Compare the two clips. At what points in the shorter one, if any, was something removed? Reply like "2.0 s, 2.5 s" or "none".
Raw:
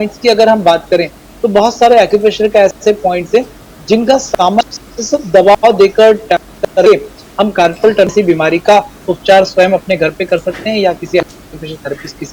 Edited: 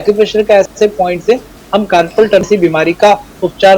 1.5 s